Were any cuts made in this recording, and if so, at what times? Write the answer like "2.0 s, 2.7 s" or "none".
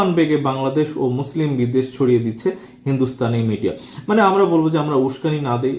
none